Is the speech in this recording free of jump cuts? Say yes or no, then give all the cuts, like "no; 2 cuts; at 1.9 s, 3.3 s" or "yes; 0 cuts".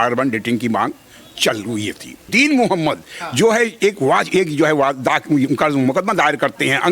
no; 1 cut; at 2.3 s